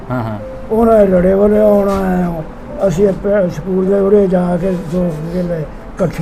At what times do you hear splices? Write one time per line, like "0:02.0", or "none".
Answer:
none

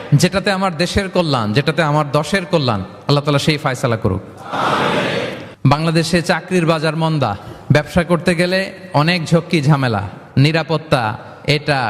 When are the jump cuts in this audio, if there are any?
0:05.4

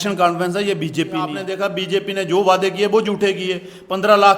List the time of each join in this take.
0:01.4

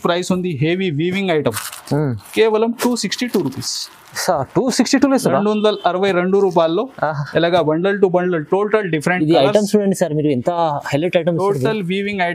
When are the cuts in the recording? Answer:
none

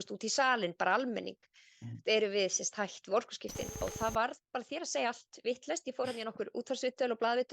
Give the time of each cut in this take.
0:03.8

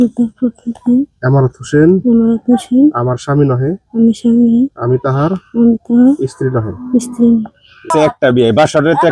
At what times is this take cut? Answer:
0:07.9

